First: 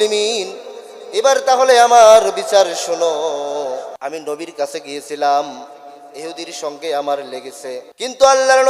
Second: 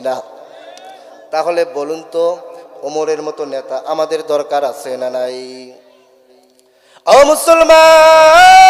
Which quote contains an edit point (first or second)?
first